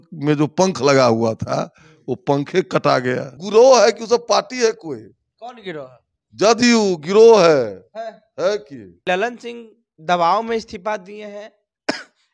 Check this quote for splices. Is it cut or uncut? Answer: cut